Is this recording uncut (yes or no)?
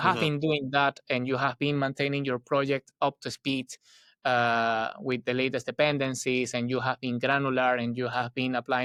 yes